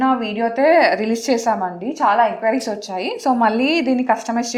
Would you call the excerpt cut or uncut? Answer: uncut